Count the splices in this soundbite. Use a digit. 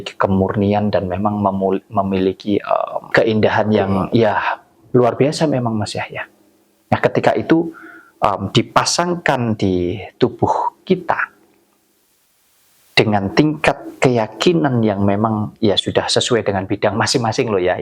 1